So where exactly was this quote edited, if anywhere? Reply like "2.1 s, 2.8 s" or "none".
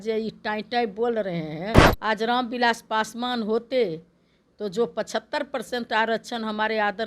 1.9 s